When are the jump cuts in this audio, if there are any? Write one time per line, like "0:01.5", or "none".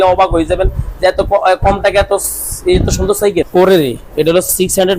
0:03.5